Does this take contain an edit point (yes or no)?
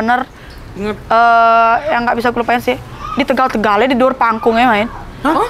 no